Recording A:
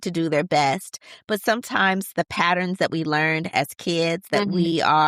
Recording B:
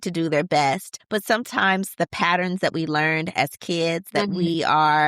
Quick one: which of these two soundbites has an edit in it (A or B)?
B